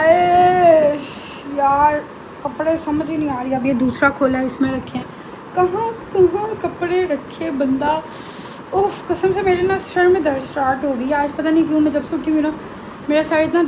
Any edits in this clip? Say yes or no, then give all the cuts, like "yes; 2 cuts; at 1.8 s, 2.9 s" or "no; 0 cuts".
no; 0 cuts